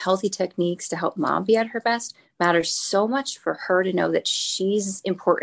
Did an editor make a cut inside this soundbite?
no; 0 cuts

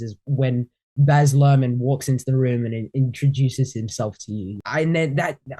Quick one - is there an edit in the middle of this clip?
yes; 1 cut; at 4.6 s

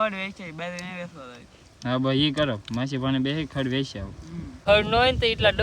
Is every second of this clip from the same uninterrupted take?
no; 1 cut; at 4.6 s

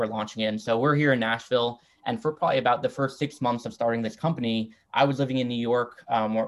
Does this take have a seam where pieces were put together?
no; 0 cuts

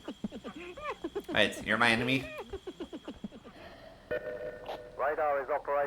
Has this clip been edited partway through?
yes; 1 cut; at 3.5 s

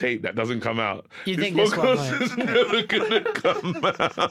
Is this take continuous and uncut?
yes; 0 cuts

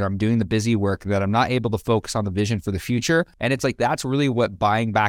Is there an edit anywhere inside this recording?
yes; 1 cut; at 3.3 s

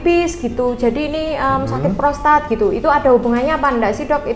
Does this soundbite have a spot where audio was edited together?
no; 0 cuts

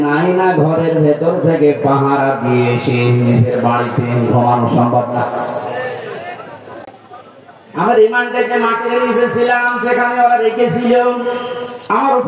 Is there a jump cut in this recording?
no; 0 cuts

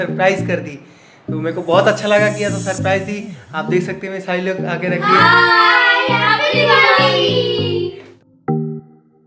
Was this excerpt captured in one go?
no; 1 cut; at 8.1 s

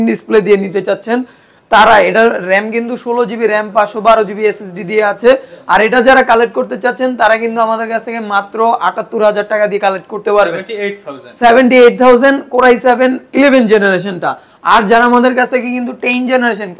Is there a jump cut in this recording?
no; 0 cuts

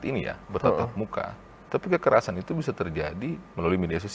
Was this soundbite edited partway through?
no; 0 cuts

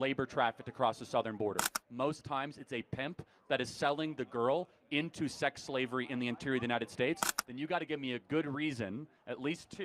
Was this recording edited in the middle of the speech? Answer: yes; 2 cuts; at 1.8 s, 7.3 s

